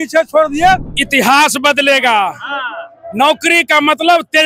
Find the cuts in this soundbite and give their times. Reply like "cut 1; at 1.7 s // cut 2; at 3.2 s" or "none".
cut 1; at 0.9 s